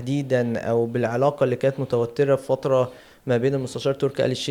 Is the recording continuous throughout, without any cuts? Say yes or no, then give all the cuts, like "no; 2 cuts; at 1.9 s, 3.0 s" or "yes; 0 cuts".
yes; 0 cuts